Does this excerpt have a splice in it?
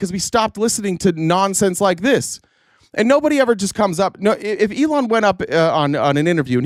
no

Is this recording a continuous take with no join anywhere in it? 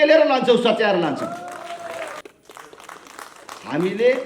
no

